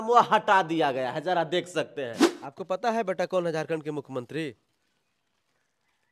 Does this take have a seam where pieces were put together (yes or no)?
yes